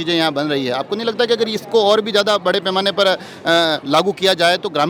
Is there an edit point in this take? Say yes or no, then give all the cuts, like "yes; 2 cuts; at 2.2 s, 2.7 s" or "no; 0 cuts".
no; 0 cuts